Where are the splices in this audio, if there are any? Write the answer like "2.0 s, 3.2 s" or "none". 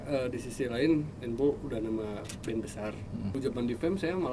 3.3 s